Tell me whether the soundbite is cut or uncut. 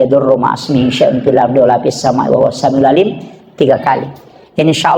uncut